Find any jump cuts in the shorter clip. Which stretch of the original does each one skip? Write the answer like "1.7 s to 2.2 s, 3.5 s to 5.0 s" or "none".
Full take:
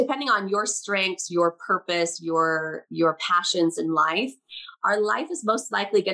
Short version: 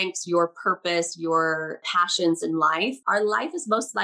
2.9 s to 3.2 s, 4.4 s to 4.8 s